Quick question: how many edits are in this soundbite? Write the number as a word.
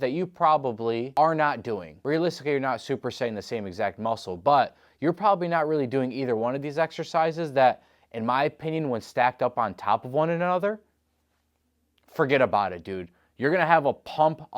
two